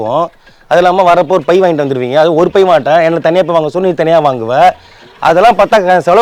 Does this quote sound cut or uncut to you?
uncut